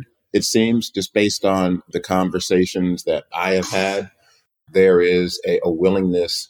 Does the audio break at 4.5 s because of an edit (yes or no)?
yes